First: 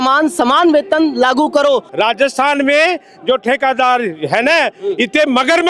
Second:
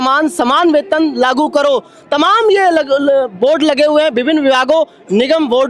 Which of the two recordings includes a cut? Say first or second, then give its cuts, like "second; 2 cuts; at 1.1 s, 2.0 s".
first; 1 cut; at 1.9 s